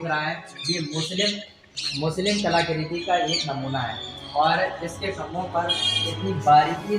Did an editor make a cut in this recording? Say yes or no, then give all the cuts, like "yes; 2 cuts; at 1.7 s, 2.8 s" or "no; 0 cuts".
no; 0 cuts